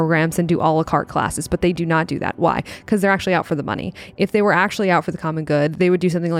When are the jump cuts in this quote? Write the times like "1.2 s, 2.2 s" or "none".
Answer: none